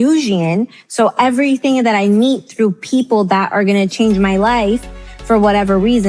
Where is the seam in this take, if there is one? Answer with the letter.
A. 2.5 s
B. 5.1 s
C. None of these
C